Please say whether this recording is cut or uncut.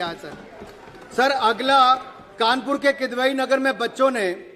uncut